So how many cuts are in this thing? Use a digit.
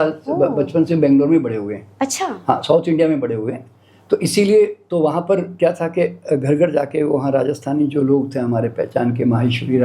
0